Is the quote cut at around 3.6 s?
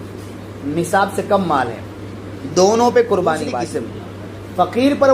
yes; 1 cut; at 3.6 s

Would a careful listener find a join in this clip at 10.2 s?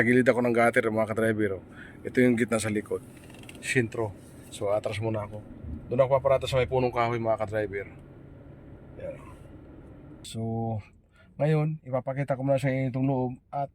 yes; 1 cut; at 10.2 s

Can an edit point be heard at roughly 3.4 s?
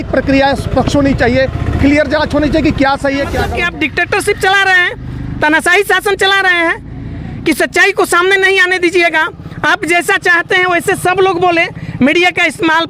yes; 1 cut; at 3.4 s

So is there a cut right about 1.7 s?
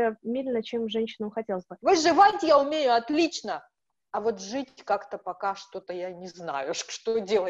yes; 1 cut; at 1.7 s

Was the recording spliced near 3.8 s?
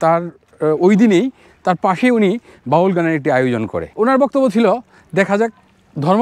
yes; 1 cut; at 3.8 s

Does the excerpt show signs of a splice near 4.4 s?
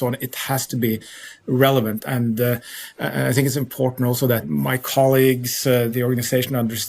yes; 3 cuts; at 2.0 s, 4.4 s, 5.9 s

